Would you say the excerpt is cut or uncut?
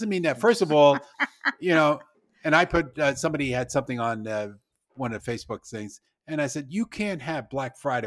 uncut